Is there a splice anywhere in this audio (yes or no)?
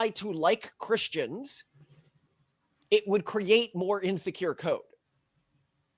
no